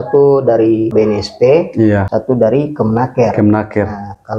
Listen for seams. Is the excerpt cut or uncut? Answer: cut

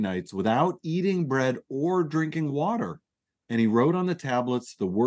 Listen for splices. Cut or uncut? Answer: uncut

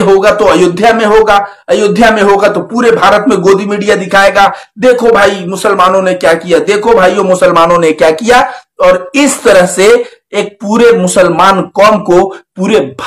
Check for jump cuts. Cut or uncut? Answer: uncut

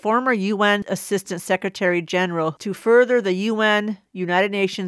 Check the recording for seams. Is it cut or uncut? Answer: cut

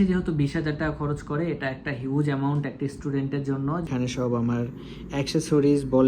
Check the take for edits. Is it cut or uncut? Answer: cut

